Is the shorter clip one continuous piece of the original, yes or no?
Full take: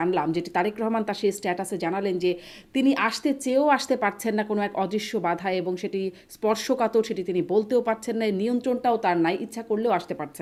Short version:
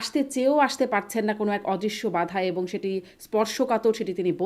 yes